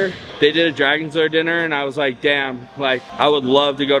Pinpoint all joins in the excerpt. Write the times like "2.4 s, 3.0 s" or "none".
none